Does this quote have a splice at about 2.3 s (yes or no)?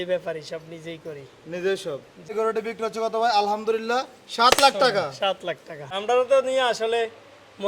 yes